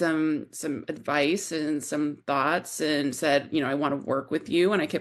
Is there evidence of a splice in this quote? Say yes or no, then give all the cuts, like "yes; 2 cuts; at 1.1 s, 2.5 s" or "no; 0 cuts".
no; 0 cuts